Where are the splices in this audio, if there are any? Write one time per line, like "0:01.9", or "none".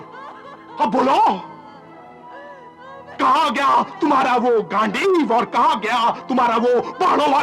none